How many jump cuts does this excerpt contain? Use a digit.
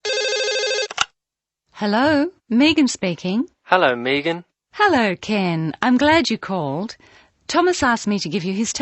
1